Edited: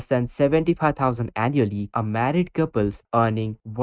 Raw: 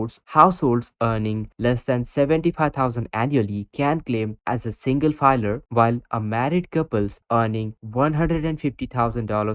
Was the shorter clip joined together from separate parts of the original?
yes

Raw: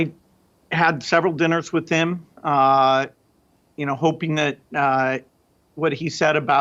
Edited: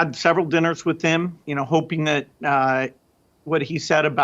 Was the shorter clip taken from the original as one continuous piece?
no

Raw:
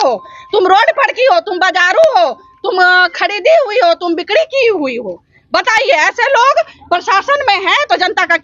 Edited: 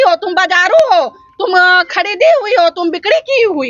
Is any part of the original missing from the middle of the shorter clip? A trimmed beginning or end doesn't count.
no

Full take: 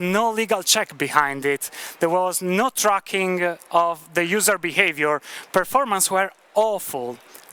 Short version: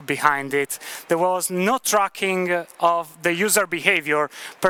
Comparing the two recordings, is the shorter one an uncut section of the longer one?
yes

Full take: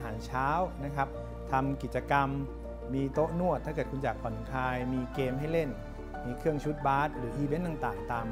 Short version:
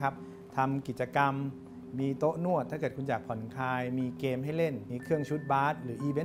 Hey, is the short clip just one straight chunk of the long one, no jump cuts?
no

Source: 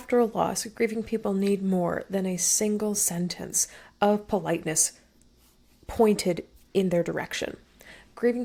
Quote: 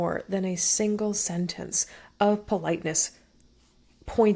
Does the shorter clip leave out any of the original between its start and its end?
no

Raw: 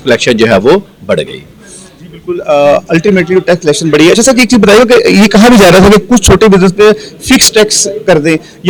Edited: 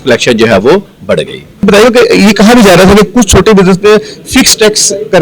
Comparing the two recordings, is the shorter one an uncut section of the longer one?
no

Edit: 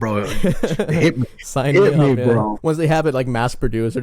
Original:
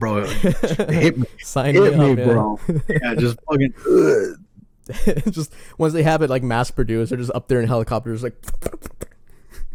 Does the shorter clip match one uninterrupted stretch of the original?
no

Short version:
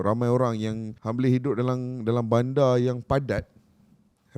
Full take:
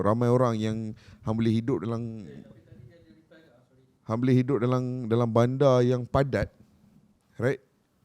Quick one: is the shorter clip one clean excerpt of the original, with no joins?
no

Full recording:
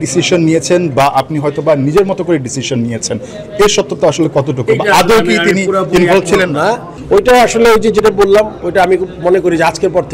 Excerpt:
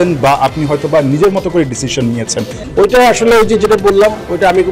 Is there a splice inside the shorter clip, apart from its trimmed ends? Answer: yes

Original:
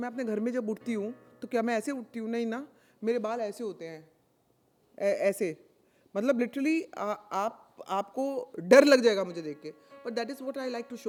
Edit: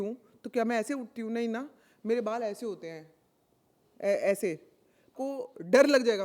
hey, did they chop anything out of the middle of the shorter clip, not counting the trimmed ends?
yes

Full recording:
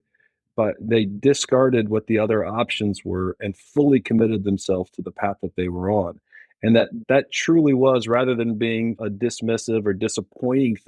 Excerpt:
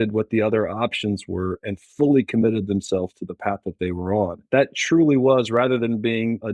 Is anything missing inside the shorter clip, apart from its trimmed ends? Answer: yes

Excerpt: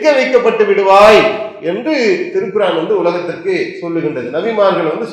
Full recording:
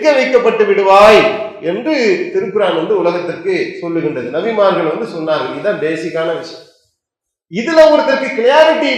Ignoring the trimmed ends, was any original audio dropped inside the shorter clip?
no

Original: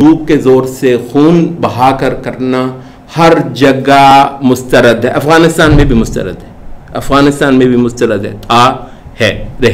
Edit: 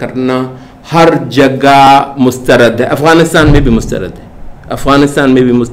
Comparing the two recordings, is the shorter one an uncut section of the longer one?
yes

